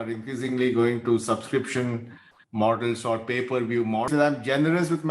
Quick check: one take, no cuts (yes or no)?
no